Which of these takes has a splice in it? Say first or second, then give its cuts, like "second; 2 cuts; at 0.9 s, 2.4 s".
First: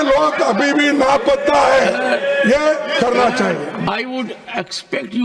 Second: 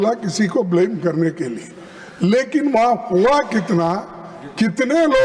first; 1 cut; at 3.8 s